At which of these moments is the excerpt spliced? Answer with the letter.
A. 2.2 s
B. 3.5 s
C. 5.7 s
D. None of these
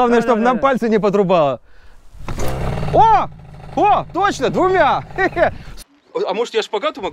C